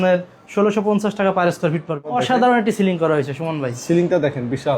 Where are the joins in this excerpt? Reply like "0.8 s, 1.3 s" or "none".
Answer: 2.1 s